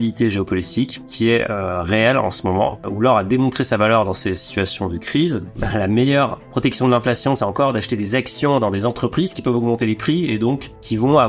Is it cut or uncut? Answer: cut